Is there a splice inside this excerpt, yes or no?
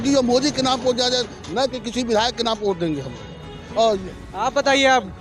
no